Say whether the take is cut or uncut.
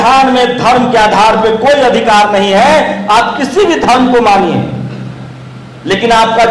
uncut